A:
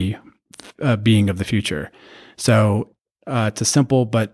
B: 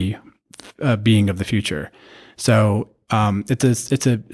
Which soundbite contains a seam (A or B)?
A